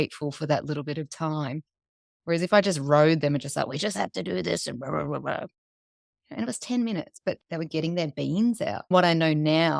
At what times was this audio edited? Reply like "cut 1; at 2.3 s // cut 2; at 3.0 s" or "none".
cut 1; at 7.4 s // cut 2; at 8.9 s